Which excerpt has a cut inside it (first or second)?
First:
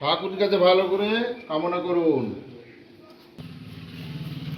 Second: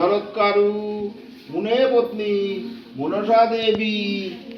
first